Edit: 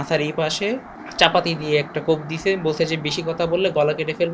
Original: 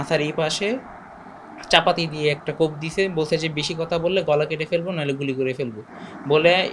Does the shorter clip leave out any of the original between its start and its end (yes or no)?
yes